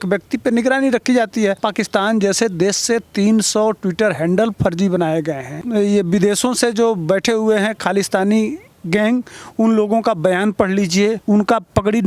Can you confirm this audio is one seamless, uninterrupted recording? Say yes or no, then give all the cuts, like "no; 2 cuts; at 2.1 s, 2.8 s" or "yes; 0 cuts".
no; 2 cuts; at 1.6 s, 11.2 s